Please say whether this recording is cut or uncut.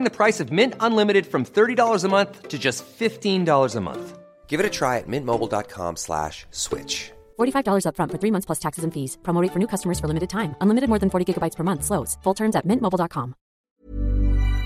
cut